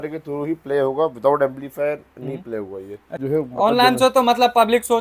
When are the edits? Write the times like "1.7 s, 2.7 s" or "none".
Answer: 3.1 s